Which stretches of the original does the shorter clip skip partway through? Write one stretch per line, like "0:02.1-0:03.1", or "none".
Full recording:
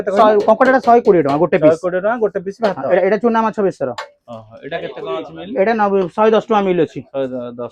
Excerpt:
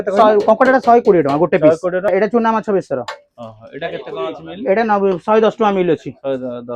0:02.1-0:03.0